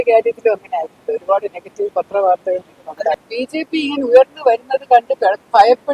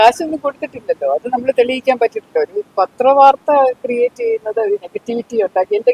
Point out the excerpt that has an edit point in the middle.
first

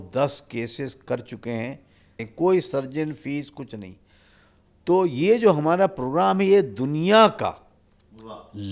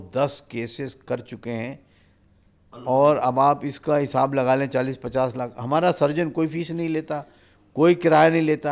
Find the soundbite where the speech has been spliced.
first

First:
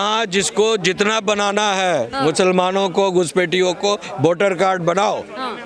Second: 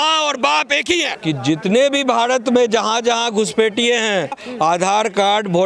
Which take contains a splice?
second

